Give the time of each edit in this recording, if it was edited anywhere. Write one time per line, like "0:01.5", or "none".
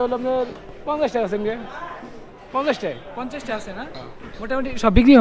none